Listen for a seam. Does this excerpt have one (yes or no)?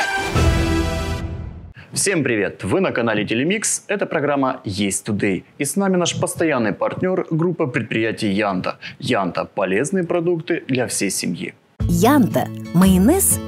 no